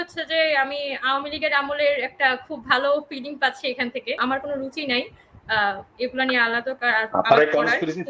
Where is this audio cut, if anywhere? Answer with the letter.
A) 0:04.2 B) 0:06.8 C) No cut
A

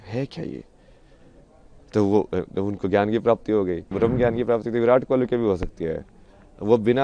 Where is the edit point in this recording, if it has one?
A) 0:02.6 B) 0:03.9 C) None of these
B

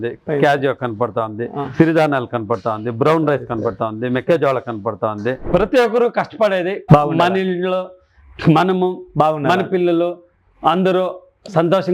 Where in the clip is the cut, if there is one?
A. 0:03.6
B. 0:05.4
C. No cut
B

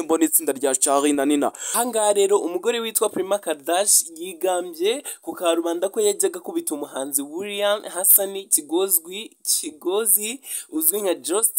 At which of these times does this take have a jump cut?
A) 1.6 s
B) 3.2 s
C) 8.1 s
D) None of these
A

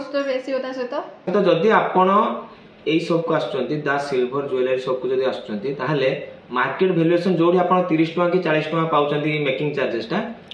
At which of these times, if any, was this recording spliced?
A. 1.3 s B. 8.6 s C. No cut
A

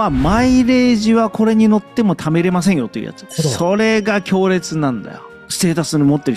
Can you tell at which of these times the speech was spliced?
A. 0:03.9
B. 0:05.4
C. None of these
B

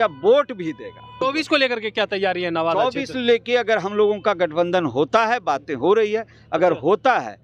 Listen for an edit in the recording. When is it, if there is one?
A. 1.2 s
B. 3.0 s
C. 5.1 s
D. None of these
A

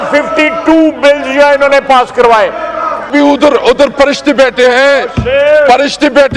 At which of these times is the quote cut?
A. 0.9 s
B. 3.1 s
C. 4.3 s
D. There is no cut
B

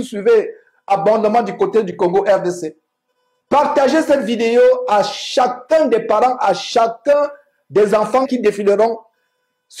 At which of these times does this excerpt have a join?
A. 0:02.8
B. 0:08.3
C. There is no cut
B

